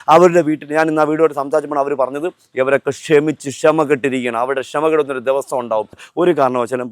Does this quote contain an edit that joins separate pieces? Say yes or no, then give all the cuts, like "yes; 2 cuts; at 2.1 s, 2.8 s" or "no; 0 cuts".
yes; 1 cut; at 6.0 s